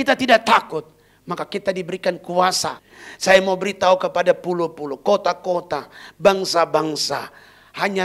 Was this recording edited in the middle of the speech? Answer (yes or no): yes